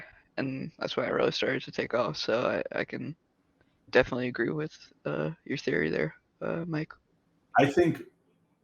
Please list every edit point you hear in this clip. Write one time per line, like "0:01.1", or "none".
0:07.4

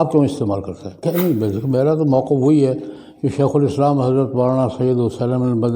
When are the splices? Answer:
0:01.0

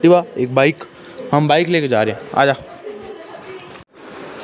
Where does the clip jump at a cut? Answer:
none

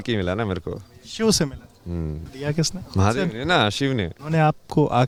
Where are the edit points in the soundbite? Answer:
none

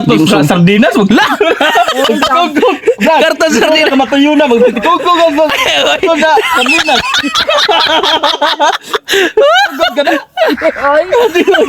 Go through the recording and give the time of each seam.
none

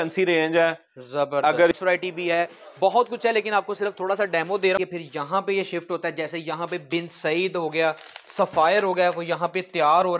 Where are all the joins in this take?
0:01.7
0:04.8

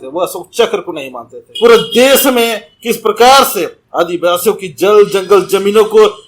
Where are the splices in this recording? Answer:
0:01.5

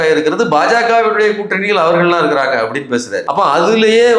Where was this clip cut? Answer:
0:03.2

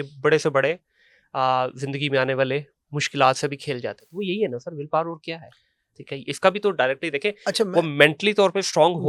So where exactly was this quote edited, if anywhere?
none

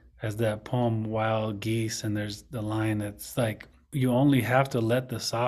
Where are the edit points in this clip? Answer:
0:03.9

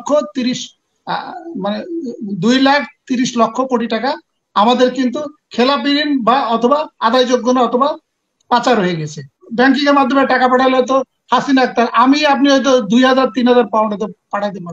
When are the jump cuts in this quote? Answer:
0:09.4

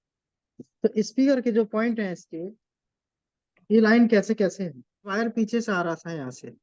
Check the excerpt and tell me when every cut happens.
0:05.1

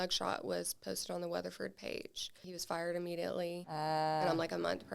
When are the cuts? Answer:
0:02.5
0:03.6

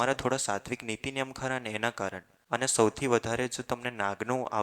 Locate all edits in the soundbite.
0:02.3

